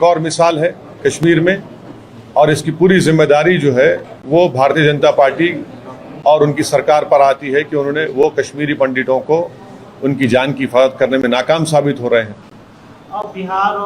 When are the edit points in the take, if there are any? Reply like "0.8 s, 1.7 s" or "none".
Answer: none